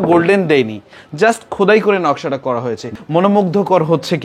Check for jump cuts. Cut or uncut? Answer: cut